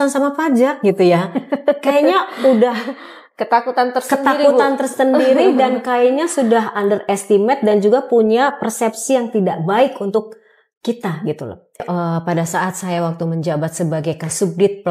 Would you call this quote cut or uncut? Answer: cut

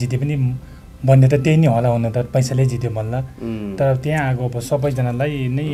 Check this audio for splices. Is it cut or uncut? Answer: uncut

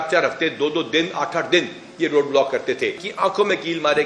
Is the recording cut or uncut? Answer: cut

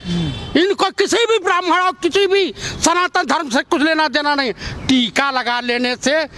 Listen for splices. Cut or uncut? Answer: uncut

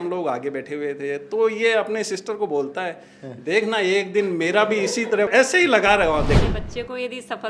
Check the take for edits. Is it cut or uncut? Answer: cut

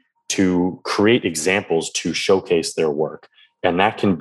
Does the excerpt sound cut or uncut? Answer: uncut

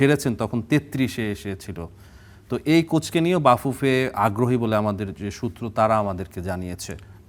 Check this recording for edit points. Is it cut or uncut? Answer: uncut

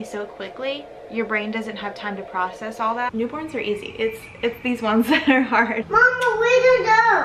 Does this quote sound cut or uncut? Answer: cut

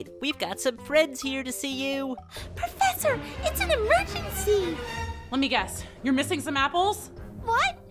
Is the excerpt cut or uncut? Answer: uncut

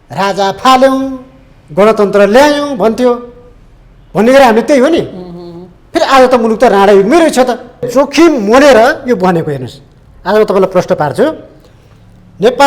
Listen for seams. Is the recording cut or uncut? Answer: cut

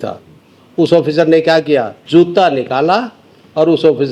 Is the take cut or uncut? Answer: cut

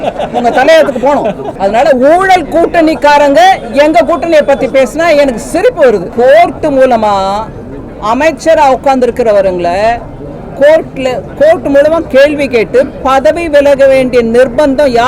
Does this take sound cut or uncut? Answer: cut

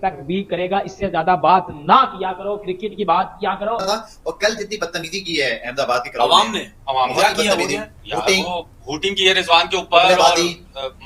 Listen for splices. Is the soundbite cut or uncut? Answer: uncut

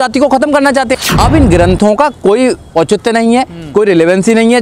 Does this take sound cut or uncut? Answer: cut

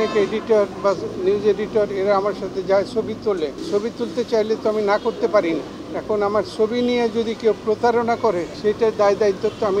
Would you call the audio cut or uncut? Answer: cut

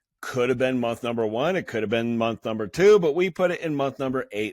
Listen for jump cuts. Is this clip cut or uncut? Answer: uncut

